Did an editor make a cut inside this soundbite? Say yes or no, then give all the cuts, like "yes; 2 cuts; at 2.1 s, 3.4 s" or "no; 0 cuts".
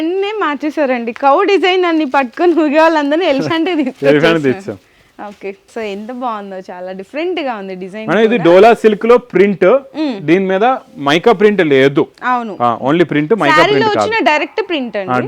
no; 0 cuts